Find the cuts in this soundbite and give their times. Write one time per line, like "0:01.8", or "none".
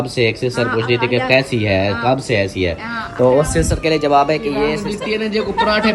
0:04.8